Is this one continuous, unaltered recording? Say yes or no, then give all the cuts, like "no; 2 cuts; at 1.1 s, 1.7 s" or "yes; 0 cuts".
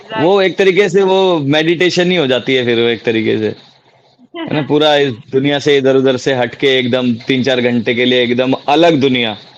yes; 0 cuts